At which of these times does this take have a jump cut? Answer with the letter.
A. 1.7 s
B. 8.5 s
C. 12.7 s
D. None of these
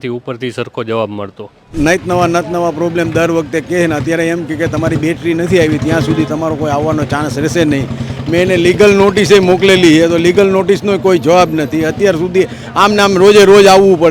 A